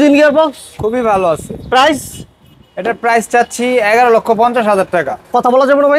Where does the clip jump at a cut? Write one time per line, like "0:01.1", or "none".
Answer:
none